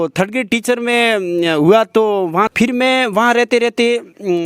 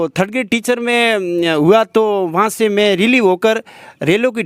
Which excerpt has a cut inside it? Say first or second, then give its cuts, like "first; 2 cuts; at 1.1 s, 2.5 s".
first; 1 cut; at 2.5 s